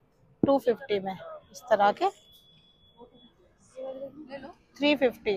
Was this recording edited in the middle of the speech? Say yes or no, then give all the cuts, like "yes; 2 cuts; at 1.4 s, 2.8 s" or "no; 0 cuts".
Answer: no; 0 cuts